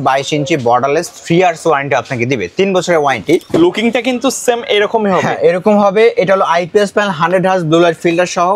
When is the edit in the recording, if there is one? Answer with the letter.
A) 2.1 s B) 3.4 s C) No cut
B